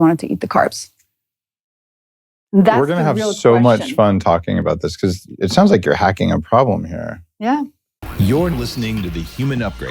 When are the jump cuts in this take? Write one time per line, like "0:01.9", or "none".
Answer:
0:08.0